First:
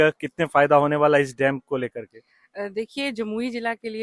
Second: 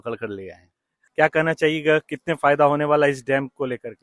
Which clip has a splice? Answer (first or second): second